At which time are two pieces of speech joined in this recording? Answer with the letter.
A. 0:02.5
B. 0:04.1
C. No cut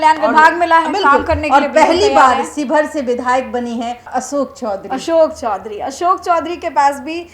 B